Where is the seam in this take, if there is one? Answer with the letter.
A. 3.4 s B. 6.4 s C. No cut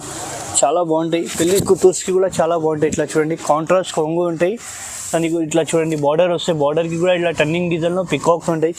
C